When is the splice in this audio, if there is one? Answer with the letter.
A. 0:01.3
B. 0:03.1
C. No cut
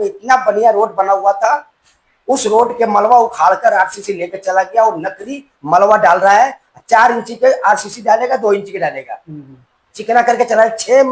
C